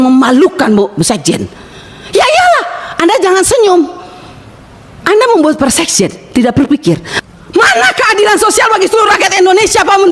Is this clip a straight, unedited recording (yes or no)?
no